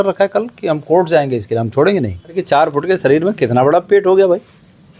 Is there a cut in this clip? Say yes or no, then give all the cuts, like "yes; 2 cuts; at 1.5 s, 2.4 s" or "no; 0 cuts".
yes; 1 cut; at 2.4 s